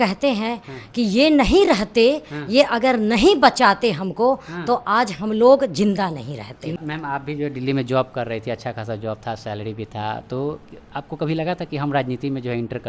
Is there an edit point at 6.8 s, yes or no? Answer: yes